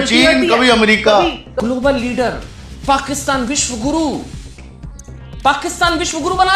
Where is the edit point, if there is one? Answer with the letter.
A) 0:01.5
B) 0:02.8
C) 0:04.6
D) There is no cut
A